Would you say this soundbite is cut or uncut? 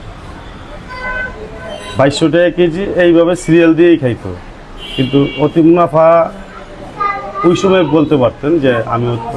uncut